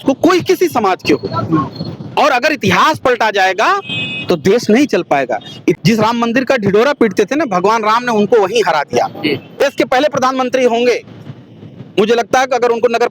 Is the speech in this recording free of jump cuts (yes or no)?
no